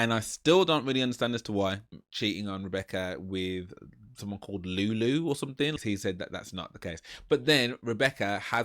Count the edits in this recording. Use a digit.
2